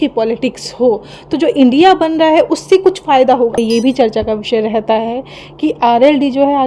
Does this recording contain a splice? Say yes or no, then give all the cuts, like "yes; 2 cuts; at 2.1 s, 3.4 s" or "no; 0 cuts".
yes; 1 cut; at 3.6 s